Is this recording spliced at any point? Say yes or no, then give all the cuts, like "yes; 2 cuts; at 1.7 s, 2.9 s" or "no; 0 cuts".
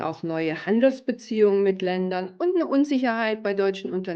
no; 0 cuts